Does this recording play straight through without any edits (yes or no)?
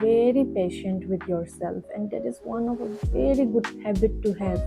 yes